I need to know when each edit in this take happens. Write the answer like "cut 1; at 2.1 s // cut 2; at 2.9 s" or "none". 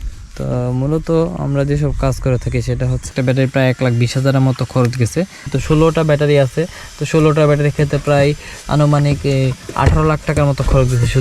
cut 1; at 3.1 s // cut 2; at 5.4 s